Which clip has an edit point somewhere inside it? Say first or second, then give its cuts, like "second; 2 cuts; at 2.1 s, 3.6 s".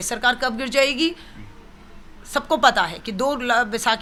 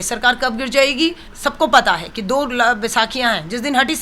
second; 1 cut; at 1.3 s